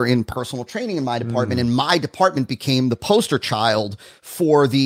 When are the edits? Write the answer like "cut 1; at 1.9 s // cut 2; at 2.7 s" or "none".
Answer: none